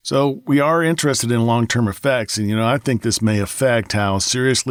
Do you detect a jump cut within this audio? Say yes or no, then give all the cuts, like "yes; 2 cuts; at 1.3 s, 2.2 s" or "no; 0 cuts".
no; 0 cuts